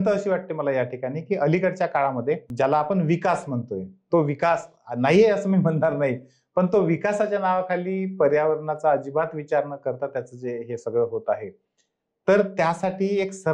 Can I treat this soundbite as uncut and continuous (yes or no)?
no